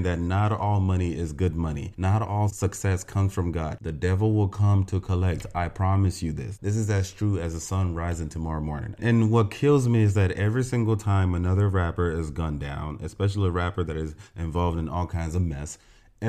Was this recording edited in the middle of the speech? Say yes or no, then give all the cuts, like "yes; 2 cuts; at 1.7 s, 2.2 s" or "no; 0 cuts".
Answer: yes; 3 cuts; at 1.9 s, 3.8 s, 8.9 s